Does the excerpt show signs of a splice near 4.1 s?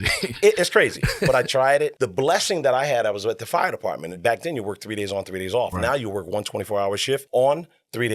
yes; 3 cuts; at 2.0 s, 4.1 s, 7.3 s

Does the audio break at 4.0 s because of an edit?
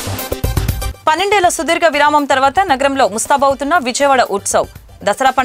no; 1 cut; at 0.9 s

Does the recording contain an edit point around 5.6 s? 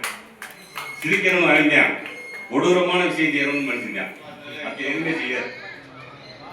yes; 1 cut; at 5.6 s

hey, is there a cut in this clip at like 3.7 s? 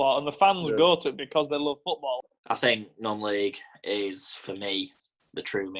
no; 1 cut; at 2.3 s

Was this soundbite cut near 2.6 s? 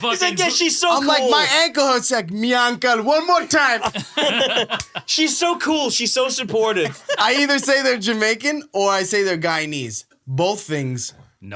no; 1 cut; at 7.0 s

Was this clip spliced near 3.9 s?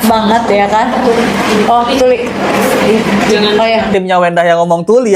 yes; 1 cut; at 3.9 s

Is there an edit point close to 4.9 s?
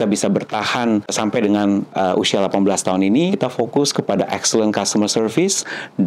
no; 1 cut; at 3.3 s

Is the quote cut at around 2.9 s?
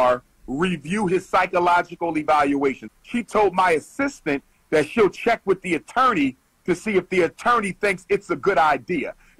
yes; 1 cut; at 2.9 s

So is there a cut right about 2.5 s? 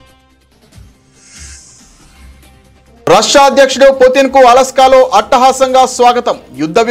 yes; 2 cuts; at 1.4 s, 2.5 s

